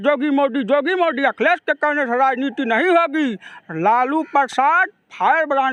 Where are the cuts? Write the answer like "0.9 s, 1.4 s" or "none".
none

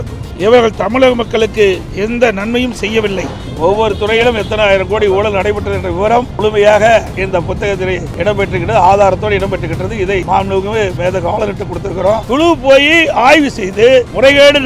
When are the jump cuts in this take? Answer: 1.9 s, 3.4 s, 10.2 s, 12.2 s

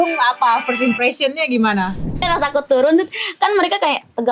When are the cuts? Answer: 2.3 s

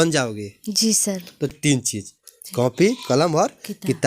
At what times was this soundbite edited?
1.5 s

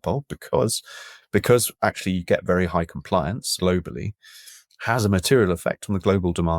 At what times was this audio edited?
3.5 s

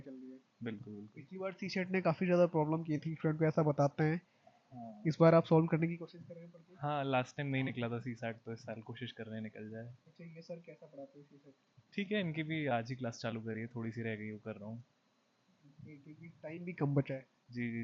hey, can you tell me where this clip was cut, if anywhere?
none

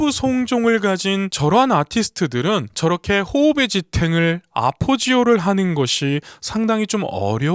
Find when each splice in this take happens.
2.7 s

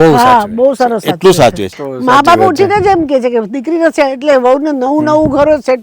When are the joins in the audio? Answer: 1.7 s

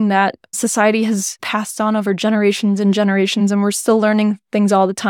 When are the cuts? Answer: 1.4 s, 3.6 s

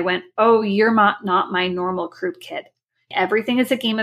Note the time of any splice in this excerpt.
3.1 s

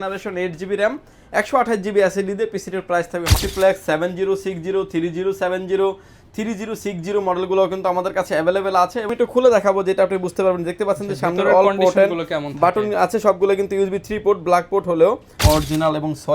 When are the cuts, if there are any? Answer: 3.4 s, 9.1 s, 15.4 s

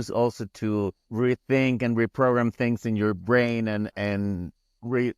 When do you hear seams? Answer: 1.0 s

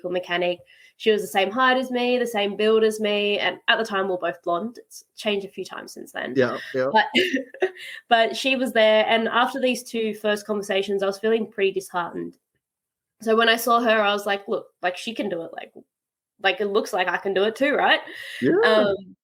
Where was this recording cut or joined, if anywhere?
none

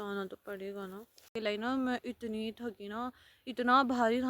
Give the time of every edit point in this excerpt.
1.4 s

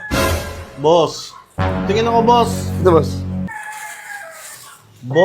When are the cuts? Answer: 3.5 s

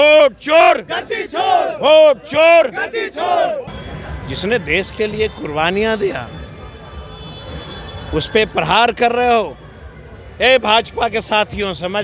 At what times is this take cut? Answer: 3.8 s

